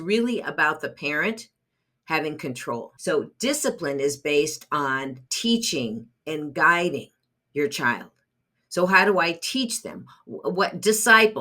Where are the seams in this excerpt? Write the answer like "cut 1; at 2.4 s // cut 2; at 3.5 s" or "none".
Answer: cut 1; at 2.9 s